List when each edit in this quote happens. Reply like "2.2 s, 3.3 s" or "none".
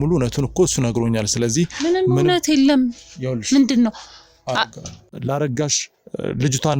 5.1 s